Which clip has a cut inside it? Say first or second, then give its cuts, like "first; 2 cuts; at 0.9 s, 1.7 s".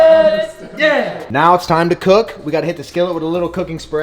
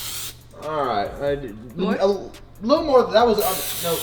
first; 1 cut; at 1.2 s